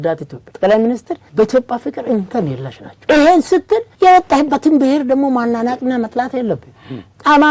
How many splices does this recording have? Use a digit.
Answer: 0